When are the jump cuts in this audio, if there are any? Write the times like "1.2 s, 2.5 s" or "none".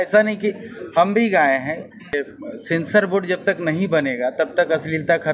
2.1 s